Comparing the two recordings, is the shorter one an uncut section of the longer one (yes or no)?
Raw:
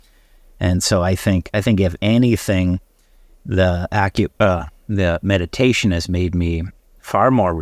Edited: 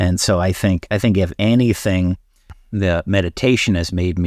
no